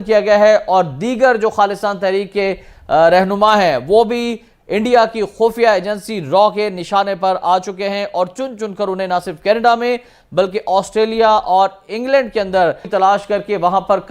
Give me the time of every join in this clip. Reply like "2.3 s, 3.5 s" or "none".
12.9 s